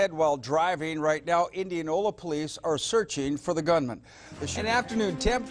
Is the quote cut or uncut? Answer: cut